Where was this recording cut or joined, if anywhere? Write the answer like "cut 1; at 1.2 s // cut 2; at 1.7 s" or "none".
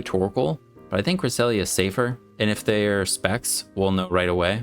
cut 1; at 2.2 s